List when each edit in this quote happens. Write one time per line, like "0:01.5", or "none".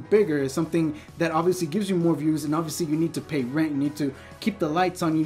none